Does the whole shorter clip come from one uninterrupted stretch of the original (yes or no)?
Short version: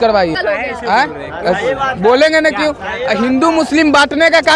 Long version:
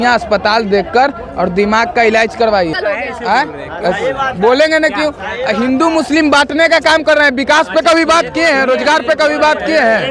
yes